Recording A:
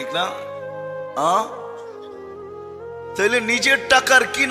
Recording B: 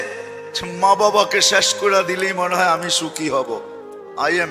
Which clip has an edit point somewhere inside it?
A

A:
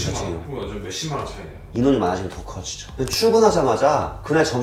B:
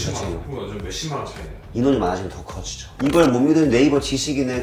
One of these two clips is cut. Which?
B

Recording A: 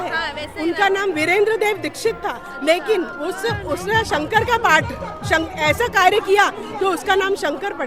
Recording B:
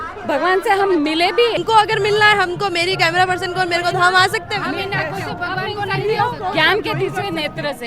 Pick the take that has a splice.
B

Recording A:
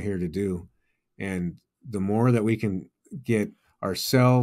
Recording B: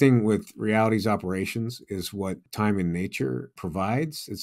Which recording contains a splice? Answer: B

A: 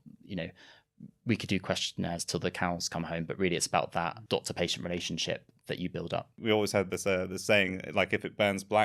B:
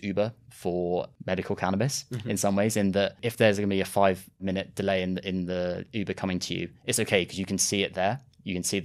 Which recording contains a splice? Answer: A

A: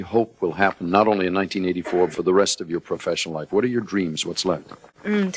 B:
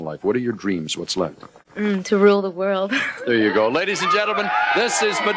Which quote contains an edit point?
A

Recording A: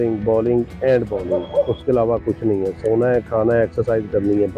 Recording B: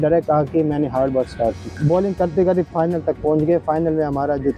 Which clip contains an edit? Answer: B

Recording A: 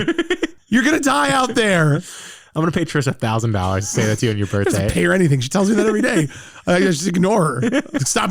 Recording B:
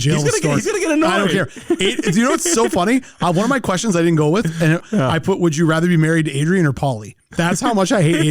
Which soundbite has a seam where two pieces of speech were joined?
B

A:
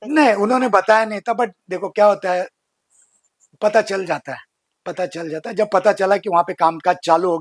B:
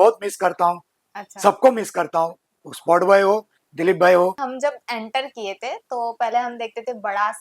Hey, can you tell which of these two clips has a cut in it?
B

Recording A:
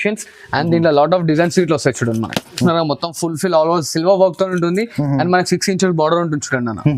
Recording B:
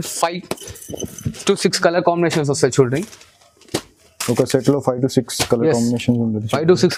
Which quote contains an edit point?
A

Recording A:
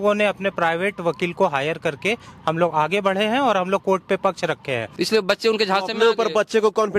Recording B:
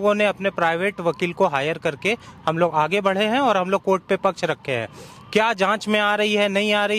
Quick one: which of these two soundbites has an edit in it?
A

